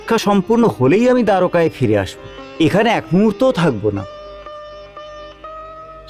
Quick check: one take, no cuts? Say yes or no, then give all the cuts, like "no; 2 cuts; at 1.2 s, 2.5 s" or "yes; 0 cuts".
yes; 0 cuts